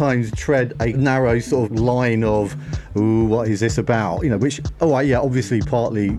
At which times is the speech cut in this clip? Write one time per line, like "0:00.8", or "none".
0:01.0
0:01.7